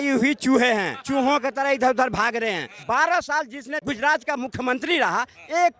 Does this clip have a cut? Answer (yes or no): yes